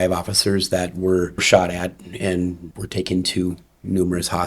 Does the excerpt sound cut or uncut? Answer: cut